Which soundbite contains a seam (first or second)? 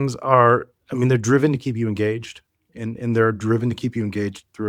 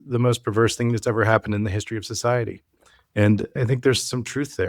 second